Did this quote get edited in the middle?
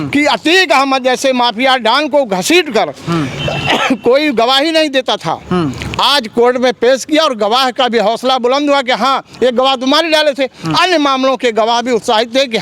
no; 0 cuts

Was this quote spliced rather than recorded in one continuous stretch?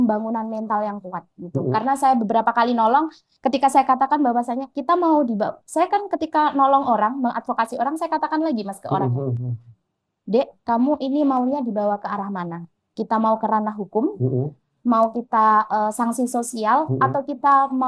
no; 0 cuts

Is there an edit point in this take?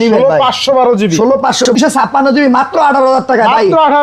yes; 1 cut; at 1.7 s

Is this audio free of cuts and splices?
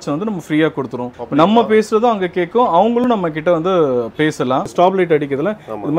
no; 2 cuts; at 1.0 s, 4.7 s

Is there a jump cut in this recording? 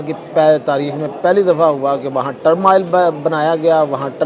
no; 0 cuts

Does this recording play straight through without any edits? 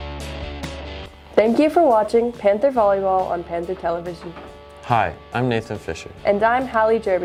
yes; 0 cuts

